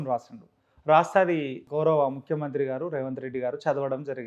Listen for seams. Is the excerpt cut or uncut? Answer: cut